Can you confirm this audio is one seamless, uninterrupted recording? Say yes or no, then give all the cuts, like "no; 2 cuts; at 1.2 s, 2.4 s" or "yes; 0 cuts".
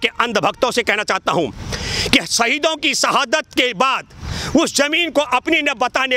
yes; 0 cuts